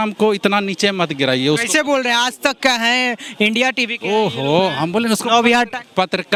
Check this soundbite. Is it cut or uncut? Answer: uncut